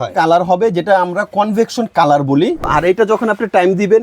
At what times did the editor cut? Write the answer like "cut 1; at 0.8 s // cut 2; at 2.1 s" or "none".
cut 1; at 2.7 s